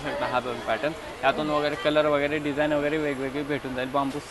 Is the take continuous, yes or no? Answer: yes